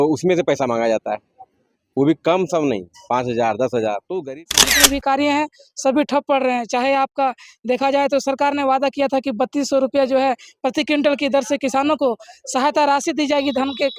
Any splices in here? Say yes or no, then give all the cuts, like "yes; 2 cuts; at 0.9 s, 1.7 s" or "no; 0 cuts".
yes; 1 cut; at 4.5 s